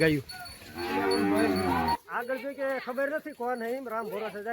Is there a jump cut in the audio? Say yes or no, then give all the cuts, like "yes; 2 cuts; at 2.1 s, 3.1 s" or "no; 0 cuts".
yes; 1 cut; at 2.0 s